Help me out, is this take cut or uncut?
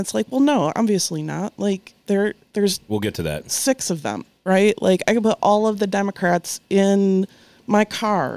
uncut